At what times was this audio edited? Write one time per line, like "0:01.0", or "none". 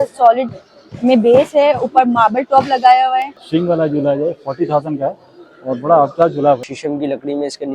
0:03.4
0:06.7